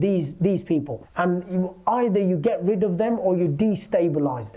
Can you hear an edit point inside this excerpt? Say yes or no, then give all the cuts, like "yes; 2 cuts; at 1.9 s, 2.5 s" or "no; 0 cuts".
no; 0 cuts